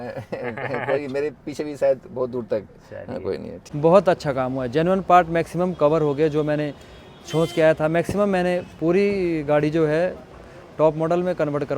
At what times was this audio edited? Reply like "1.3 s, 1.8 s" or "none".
3.6 s

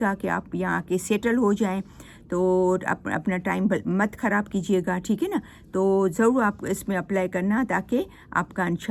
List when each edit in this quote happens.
none

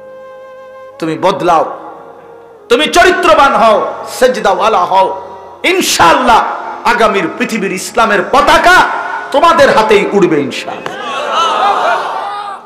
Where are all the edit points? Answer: 1.0 s

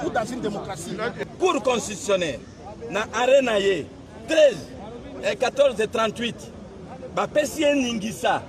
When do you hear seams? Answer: 1.2 s

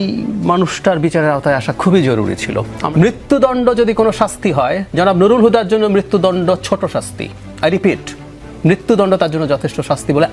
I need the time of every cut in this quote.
2.8 s

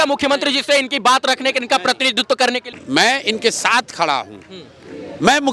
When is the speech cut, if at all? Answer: 2.7 s

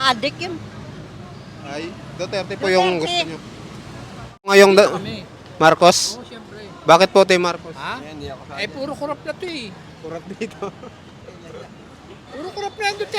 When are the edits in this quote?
4.5 s

